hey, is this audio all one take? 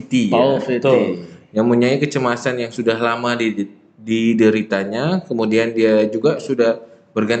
yes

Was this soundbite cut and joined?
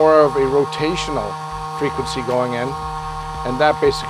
no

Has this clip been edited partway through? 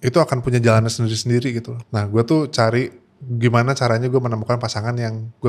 yes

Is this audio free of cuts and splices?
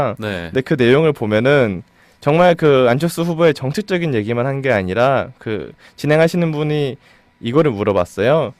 no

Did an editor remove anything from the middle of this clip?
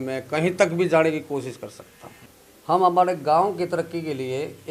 no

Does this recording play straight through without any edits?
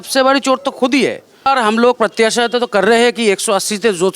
no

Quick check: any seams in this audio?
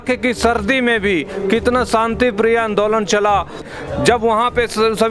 yes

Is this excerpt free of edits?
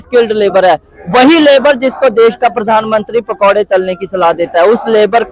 yes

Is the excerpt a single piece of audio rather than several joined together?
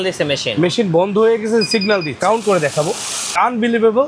no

